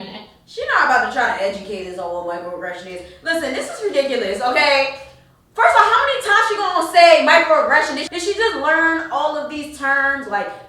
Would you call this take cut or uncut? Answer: cut